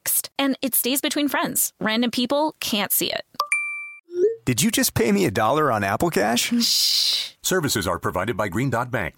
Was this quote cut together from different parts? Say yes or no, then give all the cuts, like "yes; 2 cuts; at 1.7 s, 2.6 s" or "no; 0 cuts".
no; 0 cuts